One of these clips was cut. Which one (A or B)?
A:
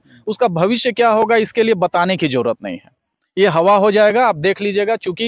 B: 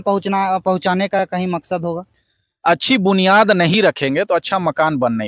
B